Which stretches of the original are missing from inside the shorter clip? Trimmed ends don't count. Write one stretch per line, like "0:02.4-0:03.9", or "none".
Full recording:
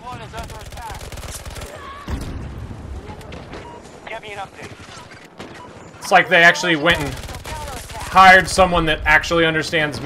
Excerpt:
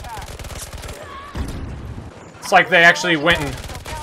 0:02.8-0:05.7